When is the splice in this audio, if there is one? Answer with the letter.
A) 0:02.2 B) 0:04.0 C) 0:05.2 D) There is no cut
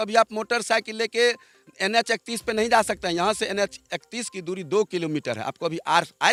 D